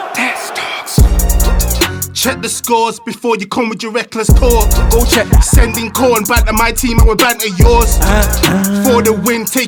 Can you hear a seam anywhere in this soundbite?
no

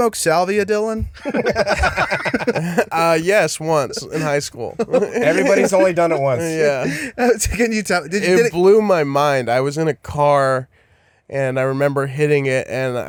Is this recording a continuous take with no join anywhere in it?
yes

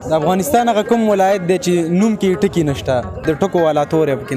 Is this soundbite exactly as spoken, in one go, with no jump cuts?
no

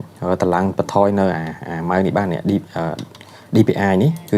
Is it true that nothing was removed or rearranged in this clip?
yes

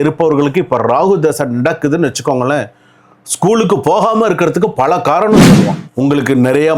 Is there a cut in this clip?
yes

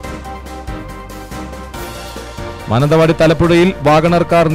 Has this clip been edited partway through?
yes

